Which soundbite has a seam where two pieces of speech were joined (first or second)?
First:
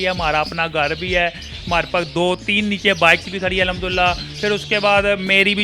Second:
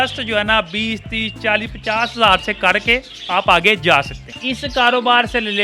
second